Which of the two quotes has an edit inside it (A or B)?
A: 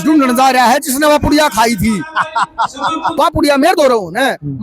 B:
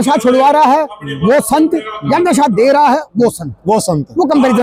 A